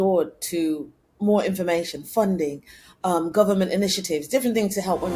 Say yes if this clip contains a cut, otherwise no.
no